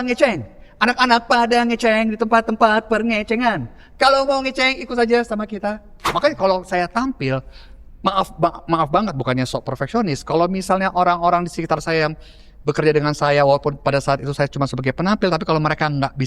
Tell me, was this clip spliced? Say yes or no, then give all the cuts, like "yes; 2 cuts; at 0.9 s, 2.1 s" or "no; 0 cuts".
yes; 1 cut; at 6.1 s